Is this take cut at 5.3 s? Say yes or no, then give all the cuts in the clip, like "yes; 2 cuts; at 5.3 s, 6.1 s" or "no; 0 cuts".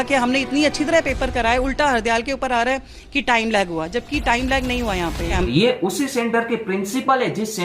yes; 1 cut; at 5.3 s